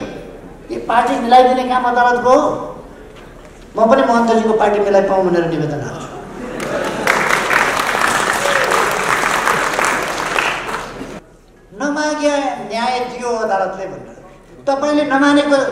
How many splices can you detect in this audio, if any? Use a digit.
1